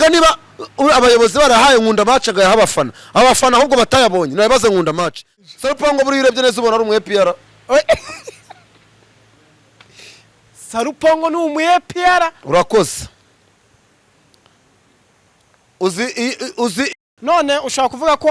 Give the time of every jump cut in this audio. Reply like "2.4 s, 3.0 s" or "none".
5.3 s, 16.9 s